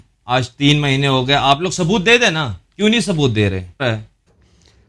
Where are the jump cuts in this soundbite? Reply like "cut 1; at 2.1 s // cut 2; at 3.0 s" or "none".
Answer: cut 1; at 3.8 s